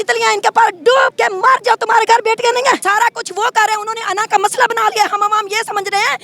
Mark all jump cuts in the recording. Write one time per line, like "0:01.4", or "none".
0:01.1
0:02.8